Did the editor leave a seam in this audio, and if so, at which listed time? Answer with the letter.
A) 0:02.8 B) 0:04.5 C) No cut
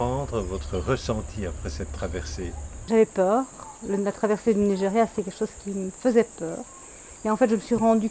A